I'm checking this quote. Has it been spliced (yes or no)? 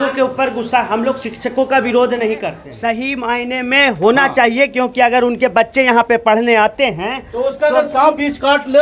yes